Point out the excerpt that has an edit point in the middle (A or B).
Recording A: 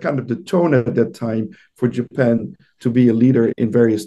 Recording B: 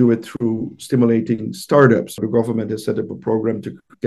B